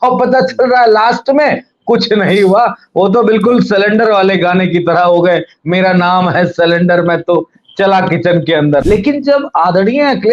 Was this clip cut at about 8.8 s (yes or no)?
yes